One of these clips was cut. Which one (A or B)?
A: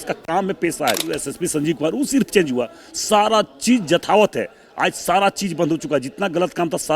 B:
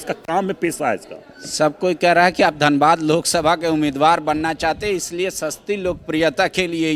A